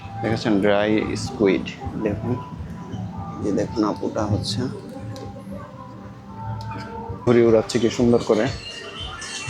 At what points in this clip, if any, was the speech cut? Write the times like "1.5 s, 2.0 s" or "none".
7.3 s